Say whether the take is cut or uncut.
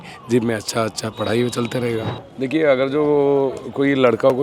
cut